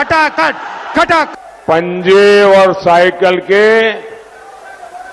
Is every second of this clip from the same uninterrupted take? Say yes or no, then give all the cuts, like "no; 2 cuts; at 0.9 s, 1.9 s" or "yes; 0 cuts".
no; 1 cut; at 1.3 s